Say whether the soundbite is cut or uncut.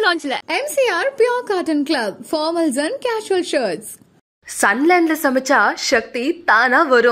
uncut